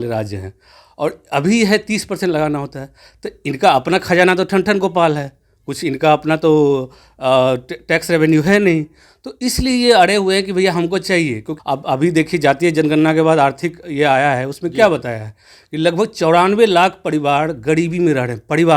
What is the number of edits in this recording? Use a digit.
1